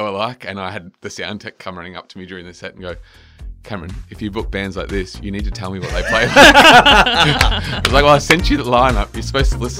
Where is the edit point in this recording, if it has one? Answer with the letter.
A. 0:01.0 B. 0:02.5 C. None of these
C